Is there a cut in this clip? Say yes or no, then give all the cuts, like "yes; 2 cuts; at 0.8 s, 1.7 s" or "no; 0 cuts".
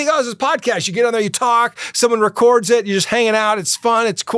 no; 0 cuts